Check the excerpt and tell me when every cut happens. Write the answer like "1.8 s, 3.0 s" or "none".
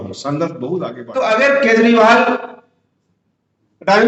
1.0 s